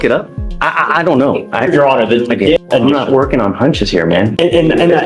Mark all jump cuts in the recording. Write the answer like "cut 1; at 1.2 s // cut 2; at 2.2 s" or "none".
cut 1; at 2.6 s